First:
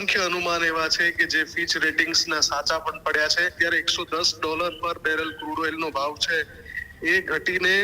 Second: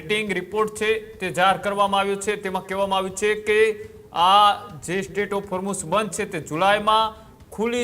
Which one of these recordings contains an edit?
first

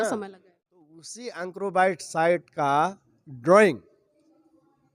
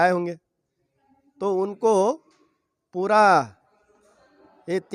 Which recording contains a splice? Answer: first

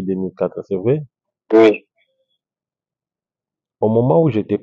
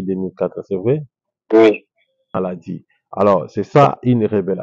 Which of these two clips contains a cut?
second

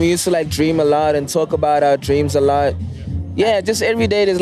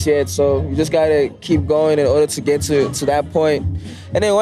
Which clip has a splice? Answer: first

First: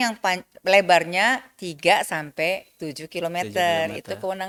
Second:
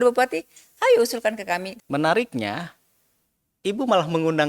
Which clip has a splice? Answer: second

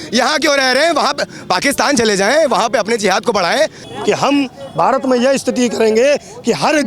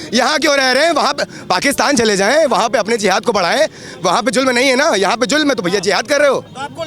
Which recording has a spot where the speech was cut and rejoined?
first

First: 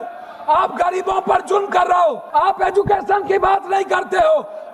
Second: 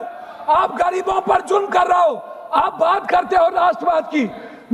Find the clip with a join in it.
first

